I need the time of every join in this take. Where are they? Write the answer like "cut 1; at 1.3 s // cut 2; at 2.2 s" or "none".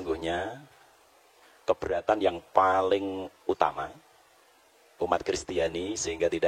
none